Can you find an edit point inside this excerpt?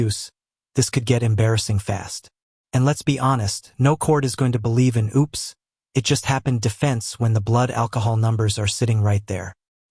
no; 0 cuts

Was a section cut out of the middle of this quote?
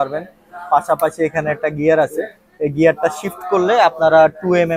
no; 0 cuts

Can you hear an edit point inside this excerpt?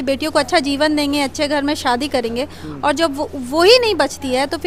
no; 0 cuts

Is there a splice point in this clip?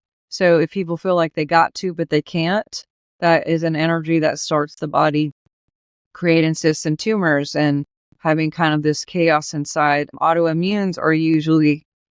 yes; 1 cut; at 10.1 s

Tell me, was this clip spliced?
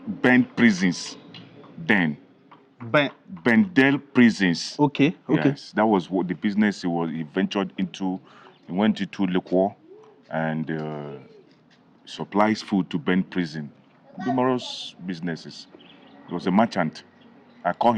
no; 0 cuts

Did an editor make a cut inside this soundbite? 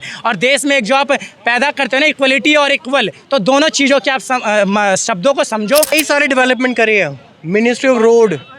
yes; 1 cut; at 5.9 s

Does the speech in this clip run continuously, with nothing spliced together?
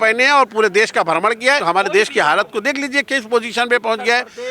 no; 1 cut; at 1.6 s

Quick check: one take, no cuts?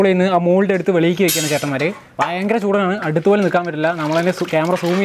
yes; 0 cuts

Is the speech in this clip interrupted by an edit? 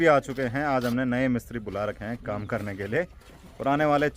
no; 0 cuts

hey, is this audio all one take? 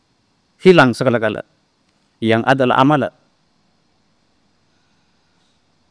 yes; 0 cuts

